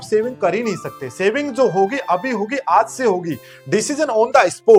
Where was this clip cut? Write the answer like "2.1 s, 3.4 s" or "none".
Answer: none